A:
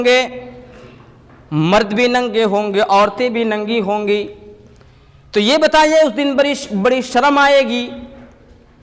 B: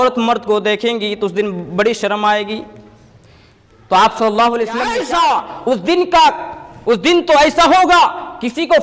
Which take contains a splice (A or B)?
B